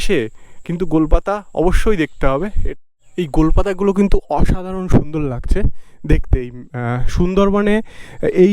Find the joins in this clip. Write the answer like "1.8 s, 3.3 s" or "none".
2.6 s